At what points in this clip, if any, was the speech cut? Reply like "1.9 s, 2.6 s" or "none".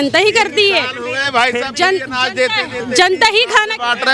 none